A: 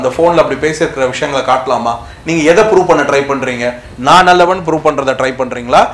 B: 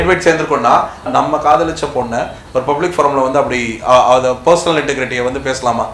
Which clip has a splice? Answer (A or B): B